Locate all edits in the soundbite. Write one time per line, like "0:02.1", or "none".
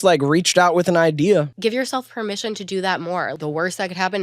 0:01.5
0:03.3